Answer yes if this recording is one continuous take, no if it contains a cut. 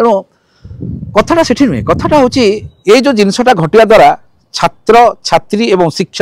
yes